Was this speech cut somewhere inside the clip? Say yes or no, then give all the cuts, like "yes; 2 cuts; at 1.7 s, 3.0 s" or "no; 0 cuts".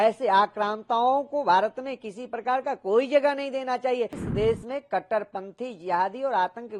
yes; 1 cut; at 4.2 s